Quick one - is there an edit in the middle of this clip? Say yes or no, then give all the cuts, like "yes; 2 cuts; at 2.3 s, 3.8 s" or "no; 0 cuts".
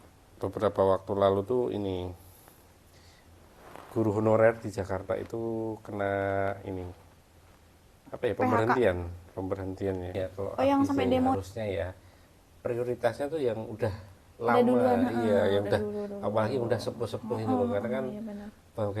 yes; 1 cut; at 11.4 s